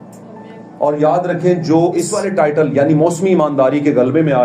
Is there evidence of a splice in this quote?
yes; 1 cut; at 2.2 s

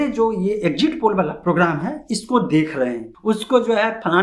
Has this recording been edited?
yes; 1 cut; at 3.1 s

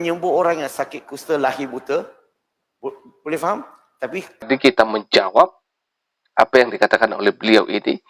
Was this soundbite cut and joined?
yes; 1 cut; at 4.5 s

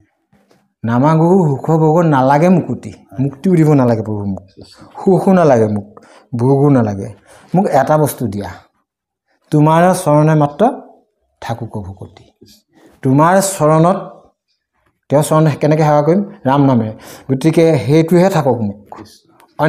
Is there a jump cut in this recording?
no; 0 cuts

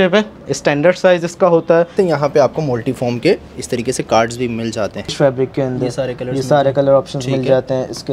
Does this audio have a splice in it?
yes; 2 cuts; at 2.0 s, 5.1 s

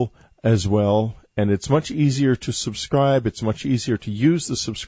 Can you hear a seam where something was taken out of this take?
no; 0 cuts

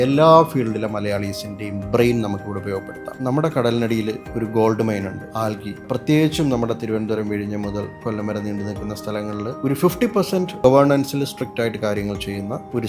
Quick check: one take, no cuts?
no; 3 cuts; at 3.0 s, 5.2 s, 9.5 s

